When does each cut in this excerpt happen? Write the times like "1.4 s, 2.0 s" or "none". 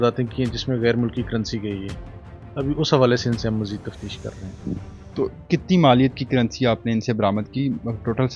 none

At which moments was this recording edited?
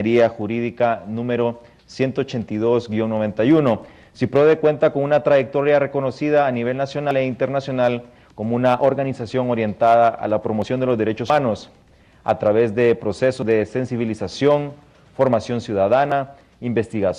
9.3 s

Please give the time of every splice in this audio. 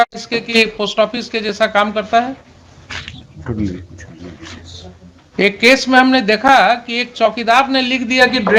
none

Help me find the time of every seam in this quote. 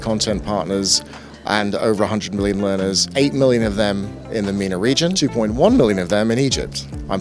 3.0 s, 5.2 s

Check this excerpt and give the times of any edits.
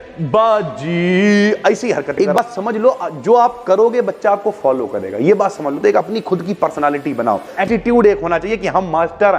2.4 s, 7.7 s

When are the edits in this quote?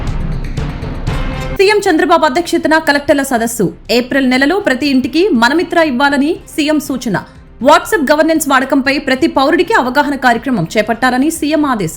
1.5 s

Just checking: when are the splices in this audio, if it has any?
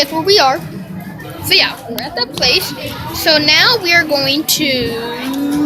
1.2 s

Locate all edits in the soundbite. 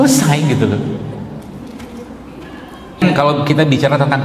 3.0 s

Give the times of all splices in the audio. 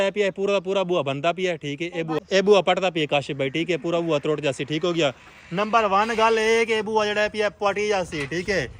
2.2 s

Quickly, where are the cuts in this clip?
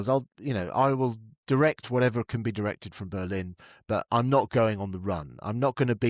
none

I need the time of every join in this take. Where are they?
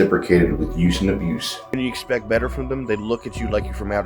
1.8 s

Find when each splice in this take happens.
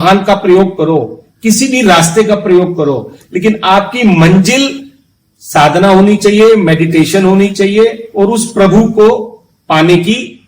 none

